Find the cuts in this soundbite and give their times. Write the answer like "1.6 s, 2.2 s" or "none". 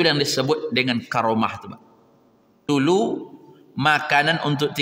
2.7 s